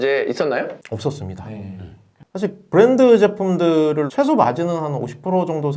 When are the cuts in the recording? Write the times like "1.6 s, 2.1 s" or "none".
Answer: 2.2 s, 4.1 s